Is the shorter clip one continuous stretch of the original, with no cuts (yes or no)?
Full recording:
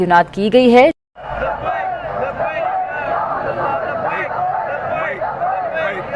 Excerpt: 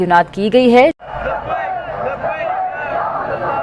no